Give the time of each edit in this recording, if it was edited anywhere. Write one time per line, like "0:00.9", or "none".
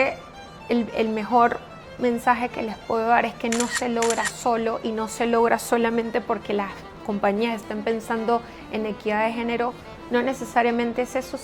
none